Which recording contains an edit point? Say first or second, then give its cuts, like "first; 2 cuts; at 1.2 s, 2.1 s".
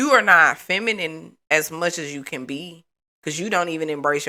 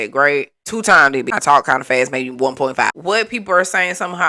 second; 2 cuts; at 1.3 s, 2.9 s